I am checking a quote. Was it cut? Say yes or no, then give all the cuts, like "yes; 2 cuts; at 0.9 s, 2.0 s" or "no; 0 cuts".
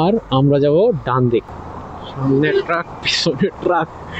yes; 1 cut; at 1.5 s